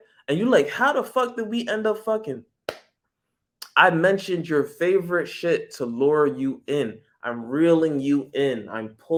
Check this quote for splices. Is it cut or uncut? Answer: uncut